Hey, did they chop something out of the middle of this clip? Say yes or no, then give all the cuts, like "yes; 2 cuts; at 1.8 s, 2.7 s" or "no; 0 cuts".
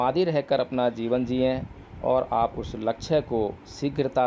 no; 0 cuts